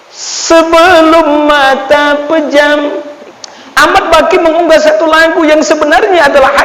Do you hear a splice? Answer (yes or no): yes